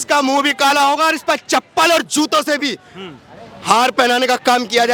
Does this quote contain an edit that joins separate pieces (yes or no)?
no